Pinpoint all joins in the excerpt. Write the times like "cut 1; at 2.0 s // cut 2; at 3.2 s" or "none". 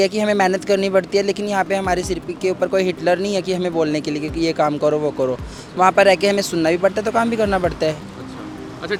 none